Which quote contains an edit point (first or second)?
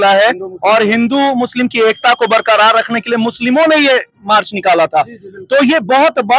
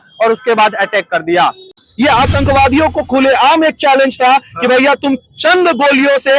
second